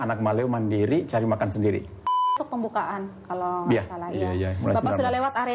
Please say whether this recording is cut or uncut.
cut